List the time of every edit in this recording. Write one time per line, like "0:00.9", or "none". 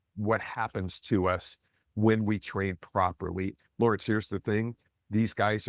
0:03.5